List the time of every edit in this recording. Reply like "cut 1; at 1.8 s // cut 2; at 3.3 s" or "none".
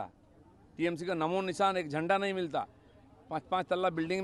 none